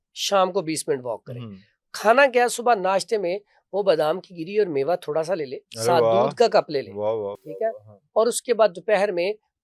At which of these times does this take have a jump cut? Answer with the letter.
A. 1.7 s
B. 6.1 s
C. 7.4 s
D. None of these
D